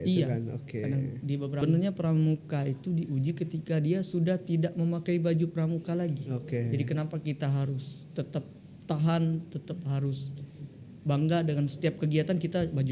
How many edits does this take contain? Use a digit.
1